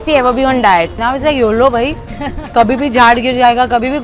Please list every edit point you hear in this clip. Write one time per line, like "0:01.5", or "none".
0:00.9